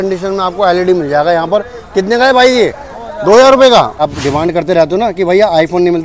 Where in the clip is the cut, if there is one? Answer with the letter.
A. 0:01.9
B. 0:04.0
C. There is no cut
B